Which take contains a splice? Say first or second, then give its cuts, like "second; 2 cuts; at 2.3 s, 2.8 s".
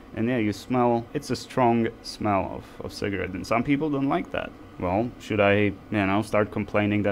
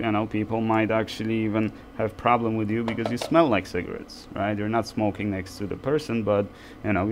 first; 3 cuts; at 1.1 s, 4.6 s, 5.8 s